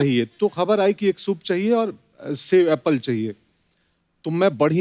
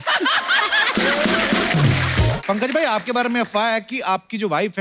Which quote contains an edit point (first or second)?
second